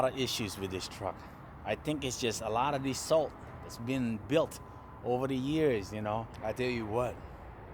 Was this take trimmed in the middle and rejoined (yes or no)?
yes